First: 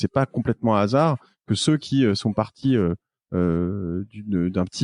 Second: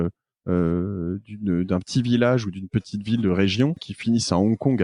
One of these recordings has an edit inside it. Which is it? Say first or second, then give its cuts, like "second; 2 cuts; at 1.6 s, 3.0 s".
second; 1 cut; at 3.9 s